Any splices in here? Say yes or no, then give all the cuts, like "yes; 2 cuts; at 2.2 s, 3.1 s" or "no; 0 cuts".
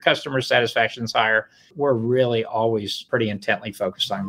yes; 2 cuts; at 1.6 s, 3.0 s